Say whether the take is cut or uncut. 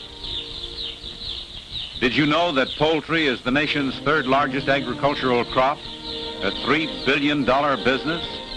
cut